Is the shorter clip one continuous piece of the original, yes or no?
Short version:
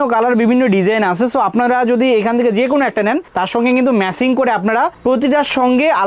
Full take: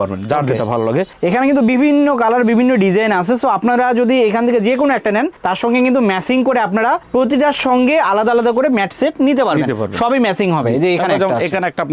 yes